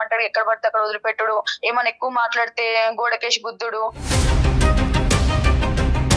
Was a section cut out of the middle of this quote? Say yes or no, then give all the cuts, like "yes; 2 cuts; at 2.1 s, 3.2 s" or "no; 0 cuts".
no; 0 cuts